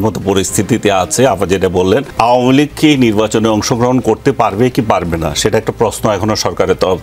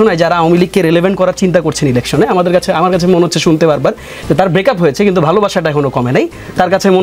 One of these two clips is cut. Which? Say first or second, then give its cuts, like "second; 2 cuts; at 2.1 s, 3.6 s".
first; 1 cut; at 2.1 s